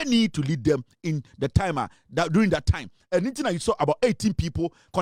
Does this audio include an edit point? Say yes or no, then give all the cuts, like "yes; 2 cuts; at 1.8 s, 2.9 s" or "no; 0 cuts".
no; 0 cuts